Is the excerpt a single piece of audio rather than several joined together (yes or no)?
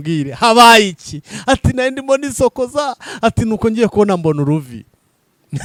yes